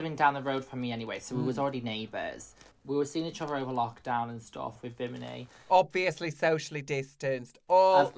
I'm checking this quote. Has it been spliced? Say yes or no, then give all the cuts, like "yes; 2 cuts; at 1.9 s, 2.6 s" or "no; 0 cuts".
yes; 2 cuts; at 2.7 s, 4.8 s